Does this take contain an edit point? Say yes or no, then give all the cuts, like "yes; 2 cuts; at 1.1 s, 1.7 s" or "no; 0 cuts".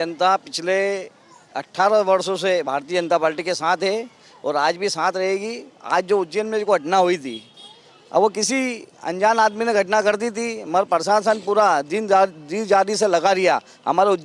no; 0 cuts